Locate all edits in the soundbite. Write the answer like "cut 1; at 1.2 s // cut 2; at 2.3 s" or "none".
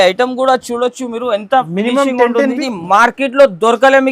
cut 1; at 2.6 s